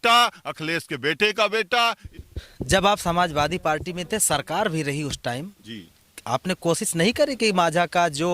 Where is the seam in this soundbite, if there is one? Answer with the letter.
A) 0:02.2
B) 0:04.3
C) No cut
A